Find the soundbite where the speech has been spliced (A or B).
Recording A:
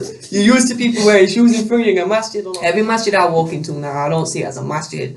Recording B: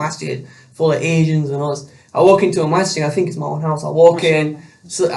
A